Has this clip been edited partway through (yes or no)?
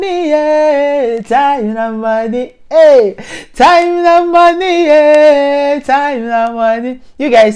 no